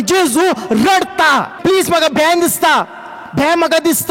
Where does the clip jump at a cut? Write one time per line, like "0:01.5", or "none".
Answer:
0:01.5